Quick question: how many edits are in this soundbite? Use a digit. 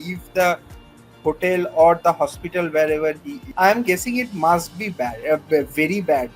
1